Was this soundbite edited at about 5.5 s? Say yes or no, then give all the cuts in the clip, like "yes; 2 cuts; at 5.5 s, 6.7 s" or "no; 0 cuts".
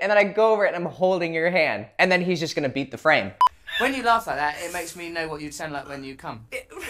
no; 1 cut; at 3.4 s